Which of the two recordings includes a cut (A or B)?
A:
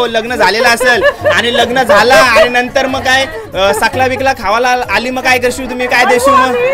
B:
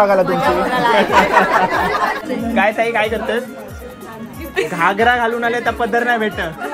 B